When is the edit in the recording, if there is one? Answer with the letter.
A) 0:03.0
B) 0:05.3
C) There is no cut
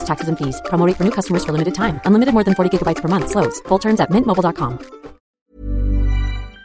B